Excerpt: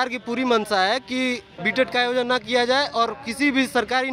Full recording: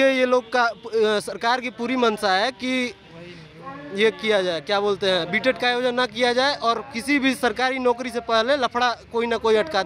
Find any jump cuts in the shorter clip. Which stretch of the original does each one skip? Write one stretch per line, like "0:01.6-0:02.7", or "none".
0:03.2-0:05.3